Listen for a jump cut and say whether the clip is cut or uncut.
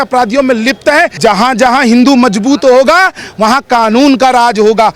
cut